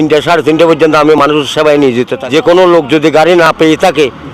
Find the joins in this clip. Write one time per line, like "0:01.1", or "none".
0:02.2

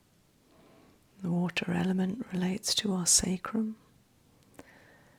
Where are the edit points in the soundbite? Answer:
none

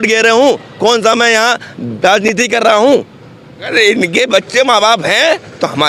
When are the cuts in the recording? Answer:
0:03.7

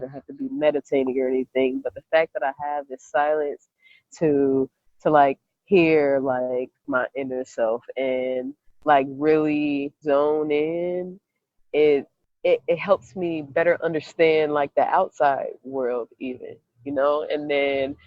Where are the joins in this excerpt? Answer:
0:06.9
0:10.0
0:12.2

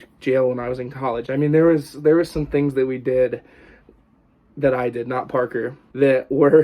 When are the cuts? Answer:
none

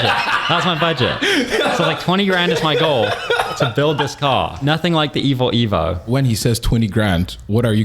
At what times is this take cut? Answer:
0:04.6
0:06.0

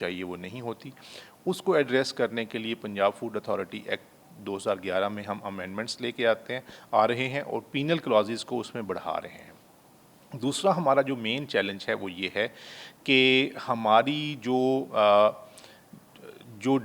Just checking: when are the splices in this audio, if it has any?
none

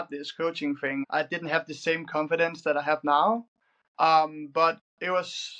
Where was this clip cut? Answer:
0:01.1

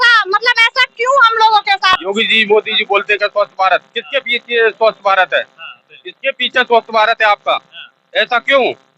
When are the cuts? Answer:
0:02.0

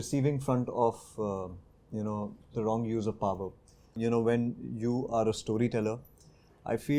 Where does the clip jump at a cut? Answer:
0:04.0

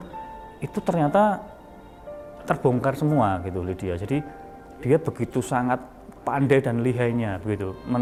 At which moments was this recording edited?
none

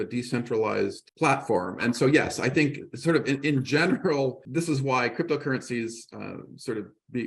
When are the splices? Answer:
0:01.0
0:04.4

